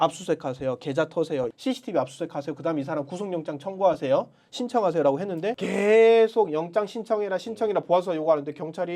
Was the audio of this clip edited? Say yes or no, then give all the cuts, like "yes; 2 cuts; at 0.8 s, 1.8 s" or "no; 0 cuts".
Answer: yes; 2 cuts; at 1.5 s, 5.5 s